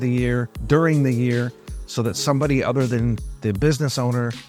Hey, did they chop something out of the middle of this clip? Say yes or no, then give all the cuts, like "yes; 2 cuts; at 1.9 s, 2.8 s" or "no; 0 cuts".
no; 0 cuts